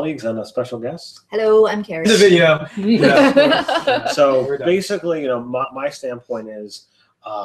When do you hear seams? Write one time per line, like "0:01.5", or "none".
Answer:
none

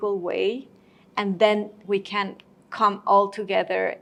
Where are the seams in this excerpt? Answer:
none

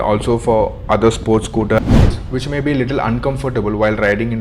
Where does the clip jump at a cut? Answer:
0:01.8

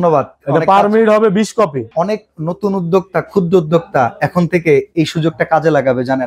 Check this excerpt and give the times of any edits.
none

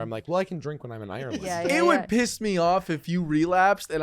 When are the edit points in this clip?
0:01.4

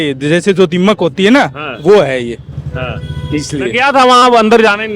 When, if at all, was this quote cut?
none

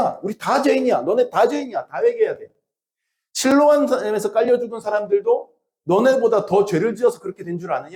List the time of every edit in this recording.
none

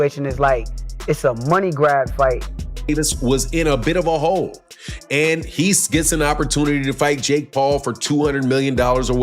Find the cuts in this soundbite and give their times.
0:02.9

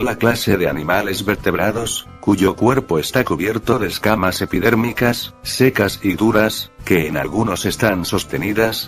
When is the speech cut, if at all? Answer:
none

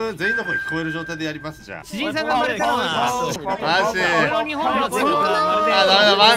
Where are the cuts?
0:01.7
0:03.3

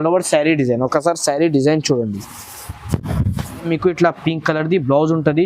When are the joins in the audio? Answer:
0:03.7

